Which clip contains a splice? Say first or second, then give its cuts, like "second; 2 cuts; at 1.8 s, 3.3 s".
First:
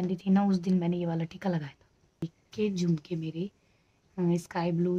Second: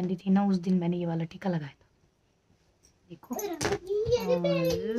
first; 1 cut; at 2.4 s